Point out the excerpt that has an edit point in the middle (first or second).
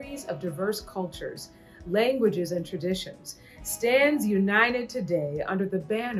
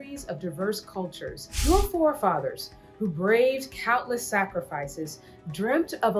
second